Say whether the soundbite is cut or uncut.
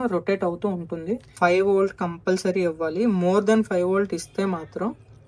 cut